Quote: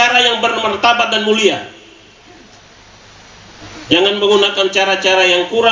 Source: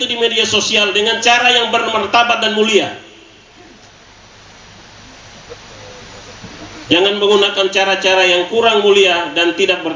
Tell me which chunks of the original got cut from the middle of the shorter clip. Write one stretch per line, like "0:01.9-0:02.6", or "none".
0:04.9-0:06.6

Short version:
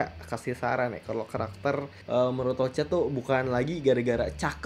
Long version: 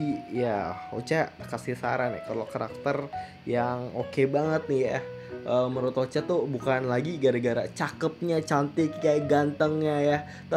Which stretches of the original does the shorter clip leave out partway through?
0:03.2-0:05.3

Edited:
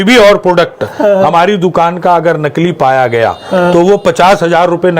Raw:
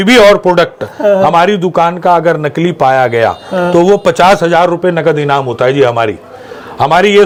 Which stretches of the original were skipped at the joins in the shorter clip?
none

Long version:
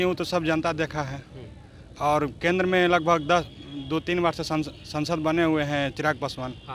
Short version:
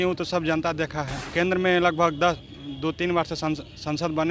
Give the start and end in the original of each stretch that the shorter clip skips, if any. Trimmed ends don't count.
0:01.3-0:02.4

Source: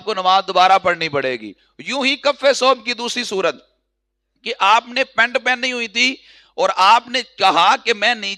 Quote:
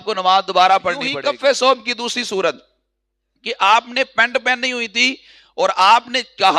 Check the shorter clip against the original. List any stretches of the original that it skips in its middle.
0:01.1-0:02.1

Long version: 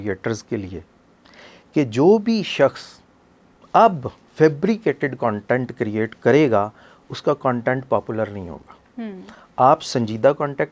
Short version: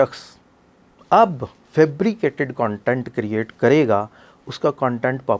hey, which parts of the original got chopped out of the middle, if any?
none

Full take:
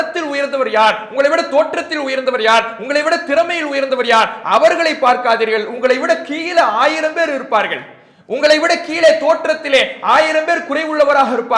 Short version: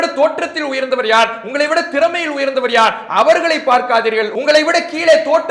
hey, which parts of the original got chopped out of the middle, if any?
0:05.7-0:08.3

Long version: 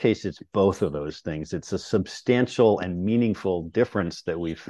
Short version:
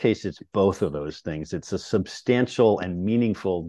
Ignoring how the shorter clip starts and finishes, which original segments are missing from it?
none

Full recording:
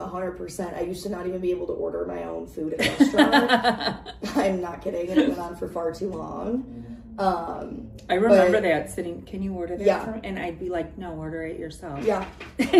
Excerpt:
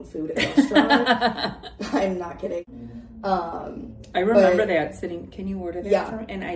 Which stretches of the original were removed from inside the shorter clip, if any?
0:05.1-0:06.6

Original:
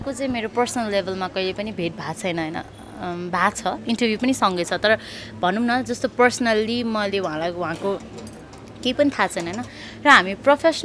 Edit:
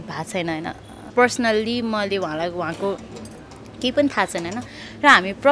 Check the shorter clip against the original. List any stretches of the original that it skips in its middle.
0:03.0-0:06.1

